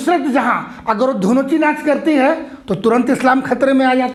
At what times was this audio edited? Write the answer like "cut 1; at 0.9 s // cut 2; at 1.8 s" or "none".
none